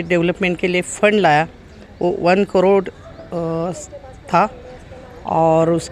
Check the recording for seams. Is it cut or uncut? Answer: uncut